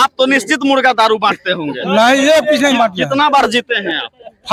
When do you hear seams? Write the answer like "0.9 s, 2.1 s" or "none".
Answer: none